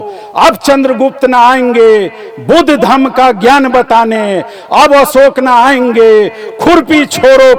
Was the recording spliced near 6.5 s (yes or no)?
no